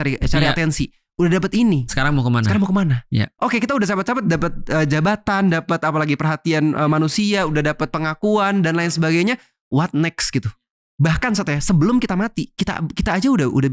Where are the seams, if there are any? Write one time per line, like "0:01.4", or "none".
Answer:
none